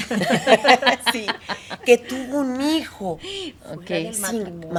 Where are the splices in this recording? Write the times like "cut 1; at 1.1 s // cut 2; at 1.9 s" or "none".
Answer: none